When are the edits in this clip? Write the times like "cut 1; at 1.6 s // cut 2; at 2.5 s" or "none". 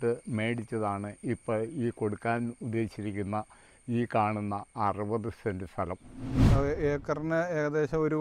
cut 1; at 6.4 s